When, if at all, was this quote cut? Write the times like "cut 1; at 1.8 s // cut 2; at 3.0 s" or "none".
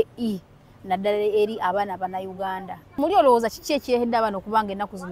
cut 1; at 2.8 s